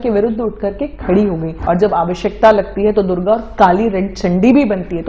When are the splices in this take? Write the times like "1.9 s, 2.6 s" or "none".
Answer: 1.6 s

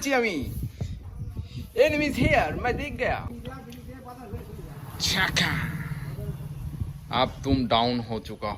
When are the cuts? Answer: 3.3 s

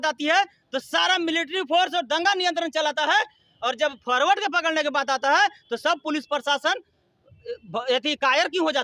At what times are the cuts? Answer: none

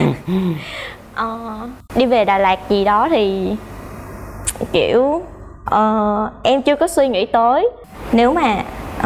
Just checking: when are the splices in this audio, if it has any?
7.9 s

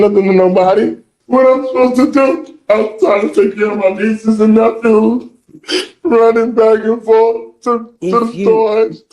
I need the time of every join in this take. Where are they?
1.1 s

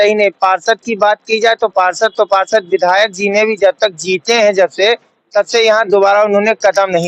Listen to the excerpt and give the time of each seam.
none

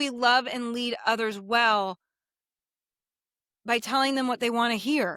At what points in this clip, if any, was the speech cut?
none

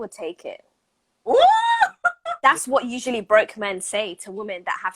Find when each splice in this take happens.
2.3 s

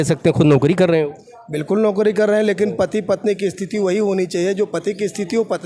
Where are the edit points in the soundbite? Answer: none

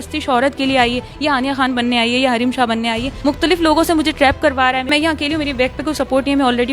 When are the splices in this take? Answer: 3.1 s, 4.9 s

